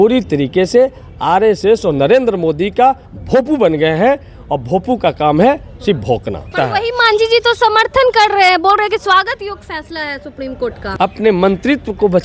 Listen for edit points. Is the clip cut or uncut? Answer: cut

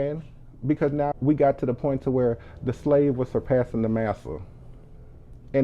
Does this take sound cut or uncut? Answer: cut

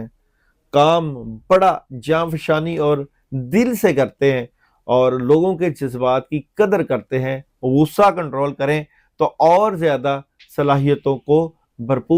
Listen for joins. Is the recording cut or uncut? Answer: uncut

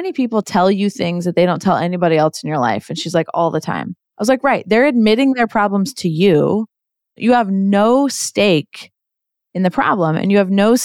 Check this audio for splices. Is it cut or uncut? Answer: cut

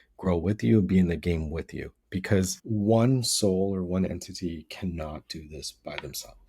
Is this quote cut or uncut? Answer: cut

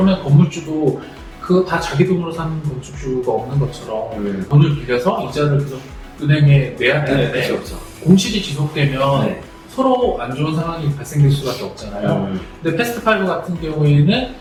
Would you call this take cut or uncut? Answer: uncut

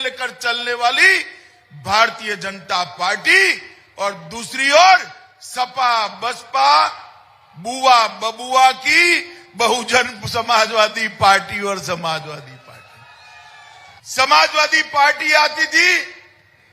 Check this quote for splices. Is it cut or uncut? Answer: cut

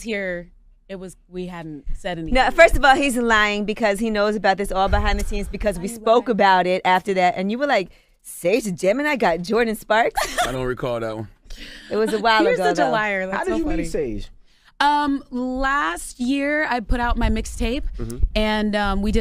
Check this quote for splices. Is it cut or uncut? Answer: cut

